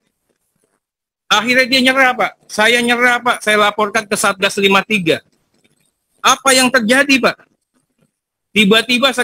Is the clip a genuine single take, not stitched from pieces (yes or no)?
yes